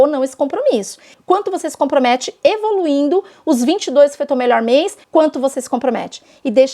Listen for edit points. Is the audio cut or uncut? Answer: cut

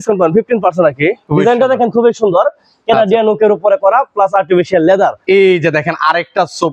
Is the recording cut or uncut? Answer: cut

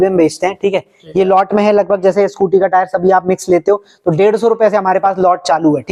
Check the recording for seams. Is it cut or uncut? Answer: uncut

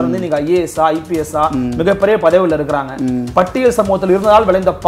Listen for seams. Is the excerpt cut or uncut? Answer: uncut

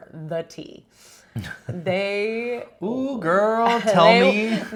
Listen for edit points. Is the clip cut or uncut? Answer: uncut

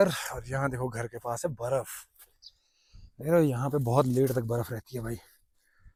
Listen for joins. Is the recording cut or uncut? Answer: uncut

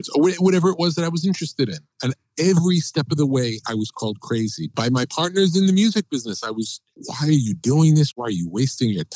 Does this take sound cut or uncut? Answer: cut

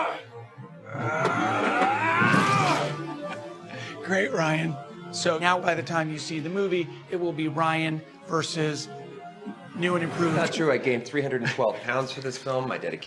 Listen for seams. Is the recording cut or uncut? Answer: uncut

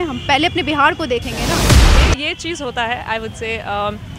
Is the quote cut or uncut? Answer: cut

